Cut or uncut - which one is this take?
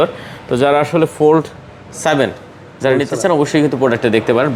uncut